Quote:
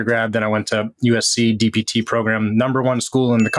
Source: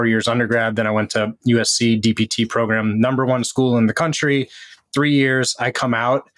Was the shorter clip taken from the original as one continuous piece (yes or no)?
yes